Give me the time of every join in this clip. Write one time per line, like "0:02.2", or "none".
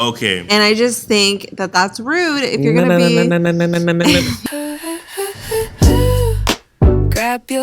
0:04.4

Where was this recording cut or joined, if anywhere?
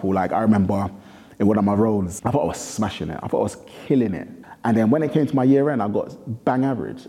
0:02.1
0:04.3

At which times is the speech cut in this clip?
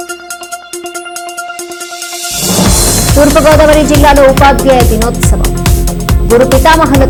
none

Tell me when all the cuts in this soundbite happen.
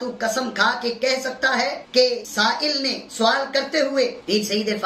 none

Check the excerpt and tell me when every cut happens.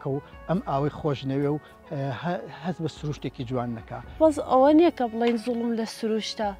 0:04.2

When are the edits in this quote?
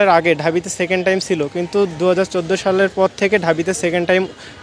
none

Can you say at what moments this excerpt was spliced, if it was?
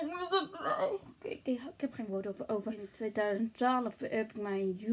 0:02.9

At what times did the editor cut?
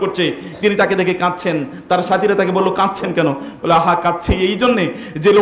none

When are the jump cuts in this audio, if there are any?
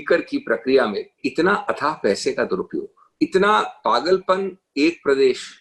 0:01.2
0:03.0

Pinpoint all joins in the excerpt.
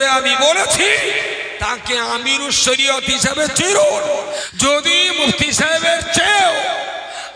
0:04.5

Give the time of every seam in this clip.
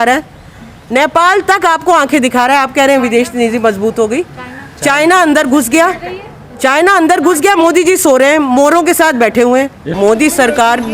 0:09.8

